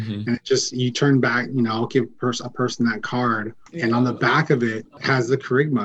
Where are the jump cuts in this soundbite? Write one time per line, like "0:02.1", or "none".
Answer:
0:03.6
0:04.9